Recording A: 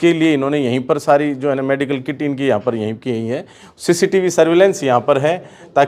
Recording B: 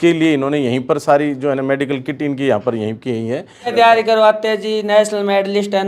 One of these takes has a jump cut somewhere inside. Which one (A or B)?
B